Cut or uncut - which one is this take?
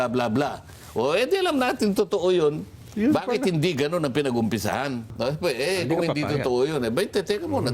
cut